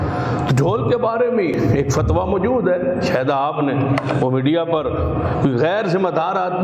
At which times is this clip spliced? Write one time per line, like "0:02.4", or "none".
0:01.5